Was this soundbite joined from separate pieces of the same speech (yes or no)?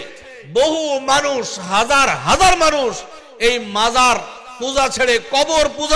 no